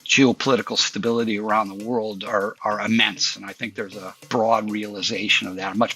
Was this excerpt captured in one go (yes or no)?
no